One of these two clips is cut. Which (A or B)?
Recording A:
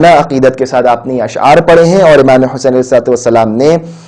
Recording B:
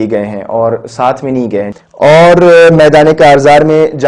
B